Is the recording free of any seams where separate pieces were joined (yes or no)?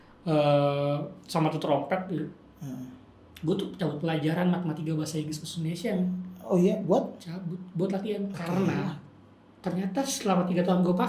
no